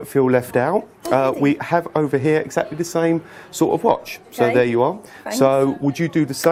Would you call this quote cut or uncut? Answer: uncut